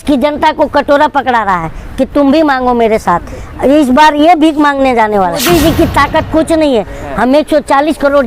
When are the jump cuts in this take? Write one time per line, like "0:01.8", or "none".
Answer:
0:05.4